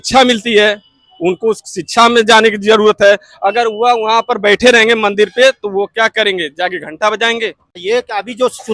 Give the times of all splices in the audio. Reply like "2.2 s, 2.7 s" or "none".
7.7 s